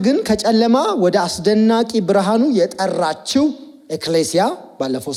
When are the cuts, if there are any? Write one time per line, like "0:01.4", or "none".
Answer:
none